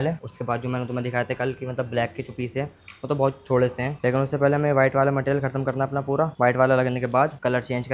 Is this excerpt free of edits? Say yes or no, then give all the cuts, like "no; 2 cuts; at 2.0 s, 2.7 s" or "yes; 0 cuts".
yes; 0 cuts